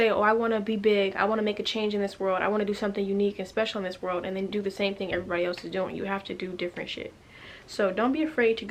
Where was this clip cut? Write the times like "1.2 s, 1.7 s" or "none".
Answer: none